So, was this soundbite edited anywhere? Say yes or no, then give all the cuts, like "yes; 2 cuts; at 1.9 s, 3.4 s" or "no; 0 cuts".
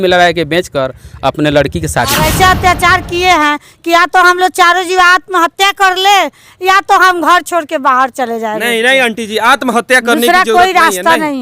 yes; 1 cut; at 2.3 s